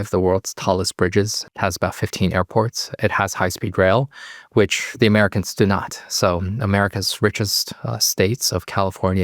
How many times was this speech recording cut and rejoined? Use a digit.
1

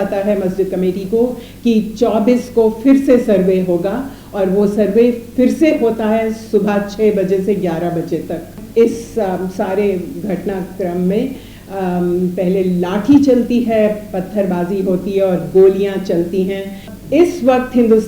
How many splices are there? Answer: 2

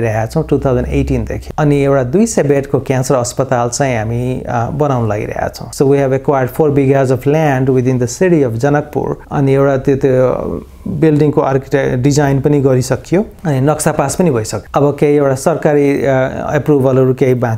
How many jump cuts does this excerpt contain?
0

